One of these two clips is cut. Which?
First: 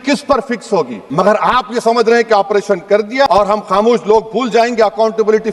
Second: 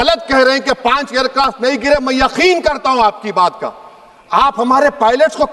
first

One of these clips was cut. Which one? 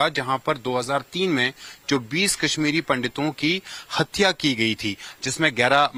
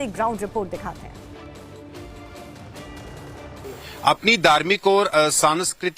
second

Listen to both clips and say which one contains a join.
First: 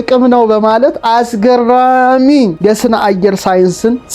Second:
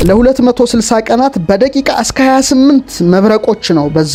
first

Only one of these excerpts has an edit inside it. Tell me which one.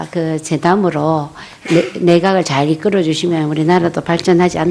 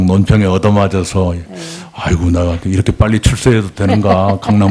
second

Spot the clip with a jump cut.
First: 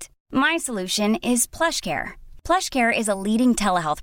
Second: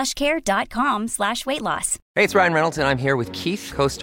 second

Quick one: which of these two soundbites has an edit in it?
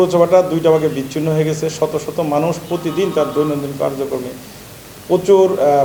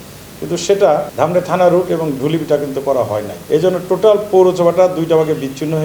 second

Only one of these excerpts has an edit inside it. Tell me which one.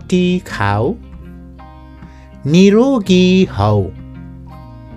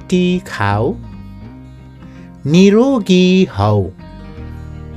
first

